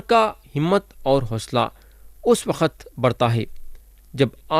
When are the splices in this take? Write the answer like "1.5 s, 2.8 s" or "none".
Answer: none